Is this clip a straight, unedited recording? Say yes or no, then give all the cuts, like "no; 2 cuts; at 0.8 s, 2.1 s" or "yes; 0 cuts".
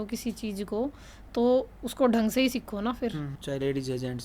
no; 1 cut; at 3.2 s